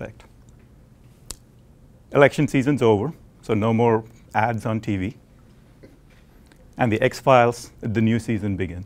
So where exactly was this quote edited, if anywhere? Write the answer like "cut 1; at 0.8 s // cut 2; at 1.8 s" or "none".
cut 1; at 5.4 s